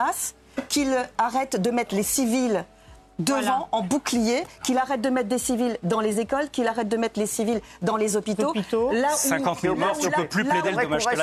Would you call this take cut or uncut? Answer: uncut